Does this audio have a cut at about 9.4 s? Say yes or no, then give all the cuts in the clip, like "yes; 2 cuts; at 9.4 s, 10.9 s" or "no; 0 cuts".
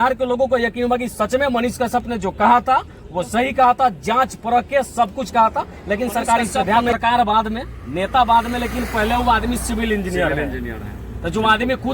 no; 1 cut; at 6.9 s